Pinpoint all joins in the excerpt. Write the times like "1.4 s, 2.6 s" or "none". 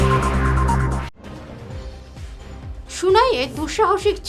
2.1 s